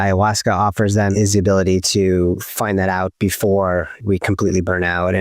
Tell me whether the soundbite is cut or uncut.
cut